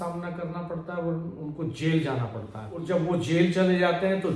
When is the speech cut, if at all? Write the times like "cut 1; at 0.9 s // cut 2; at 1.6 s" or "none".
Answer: cut 1; at 2.7 s